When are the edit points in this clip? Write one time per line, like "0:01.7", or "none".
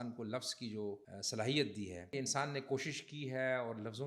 0:01.1
0:02.1